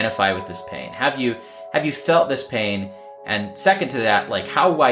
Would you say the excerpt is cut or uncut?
uncut